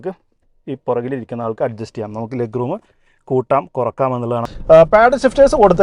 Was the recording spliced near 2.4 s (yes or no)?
no